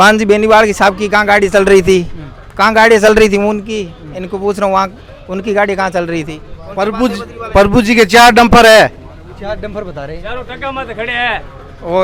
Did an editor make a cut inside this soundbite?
no; 0 cuts

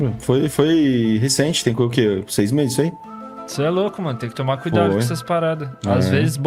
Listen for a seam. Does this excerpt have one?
no; 0 cuts

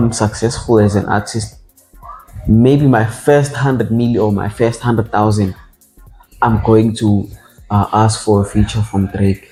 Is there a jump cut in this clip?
no; 0 cuts

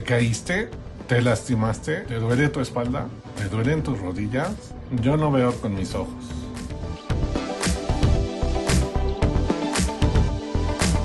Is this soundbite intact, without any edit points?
yes; 0 cuts

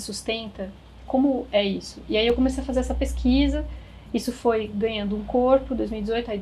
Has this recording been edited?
no; 0 cuts

